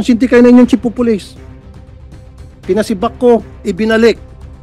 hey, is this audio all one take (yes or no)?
no